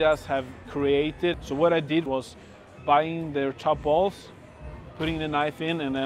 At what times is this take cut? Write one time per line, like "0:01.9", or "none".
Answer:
0:01.3
0:02.1